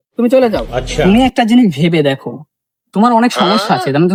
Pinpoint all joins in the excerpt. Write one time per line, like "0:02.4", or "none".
none